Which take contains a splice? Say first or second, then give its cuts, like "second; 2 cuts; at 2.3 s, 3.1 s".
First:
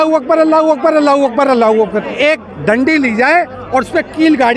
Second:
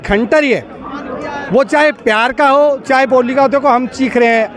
first; 1 cut; at 2.1 s